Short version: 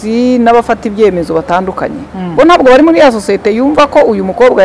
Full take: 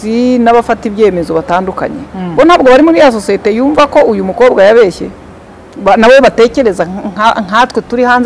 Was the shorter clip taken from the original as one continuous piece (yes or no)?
yes